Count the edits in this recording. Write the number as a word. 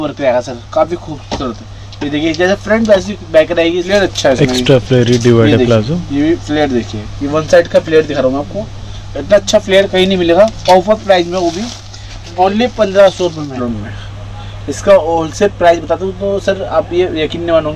two